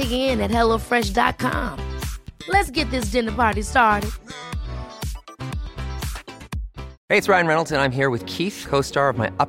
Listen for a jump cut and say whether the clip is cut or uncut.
cut